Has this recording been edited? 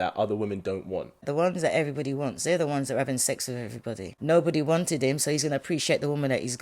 yes; 2 cuts; at 1.2 s, 4.1 s

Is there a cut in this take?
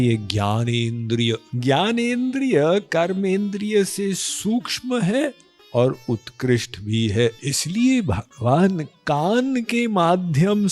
yes; 2 cuts; at 1.5 s, 7.5 s

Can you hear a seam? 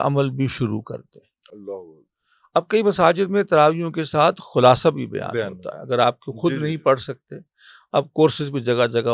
no; 0 cuts

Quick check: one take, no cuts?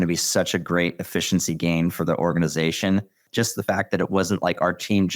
no; 1 cut; at 3.2 s

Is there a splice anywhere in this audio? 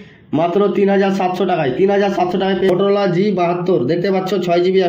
yes; 1 cut; at 2.7 s

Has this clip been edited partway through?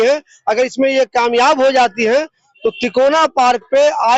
no; 0 cuts

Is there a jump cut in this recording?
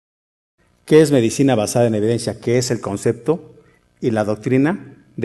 no; 0 cuts

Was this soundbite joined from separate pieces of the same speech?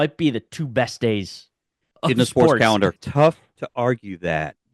yes; 1 cut; at 2.9 s

